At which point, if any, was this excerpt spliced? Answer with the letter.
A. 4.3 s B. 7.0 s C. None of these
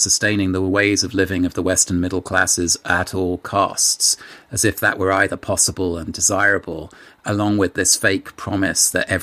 C